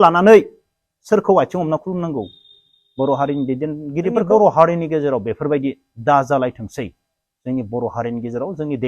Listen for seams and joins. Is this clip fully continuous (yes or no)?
no